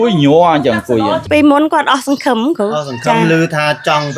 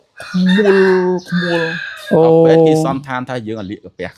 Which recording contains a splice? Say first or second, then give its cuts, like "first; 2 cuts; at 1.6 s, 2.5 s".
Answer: first; 1 cut; at 1.2 s